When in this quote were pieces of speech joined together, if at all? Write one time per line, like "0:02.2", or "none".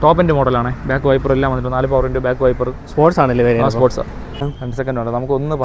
0:04.6